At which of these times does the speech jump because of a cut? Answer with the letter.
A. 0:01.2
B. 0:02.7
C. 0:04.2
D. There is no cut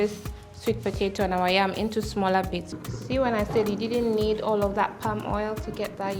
B